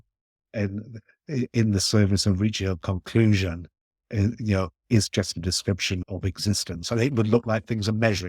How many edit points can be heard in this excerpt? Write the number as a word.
one